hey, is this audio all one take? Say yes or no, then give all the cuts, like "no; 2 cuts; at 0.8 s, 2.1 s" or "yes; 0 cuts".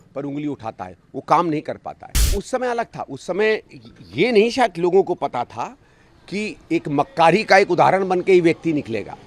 no; 1 cut; at 2.3 s